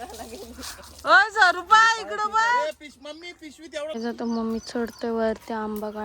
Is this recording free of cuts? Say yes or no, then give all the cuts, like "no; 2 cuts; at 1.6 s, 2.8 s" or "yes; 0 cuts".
no; 1 cut; at 3.9 s